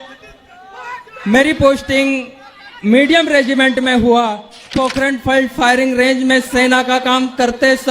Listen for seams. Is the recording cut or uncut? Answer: cut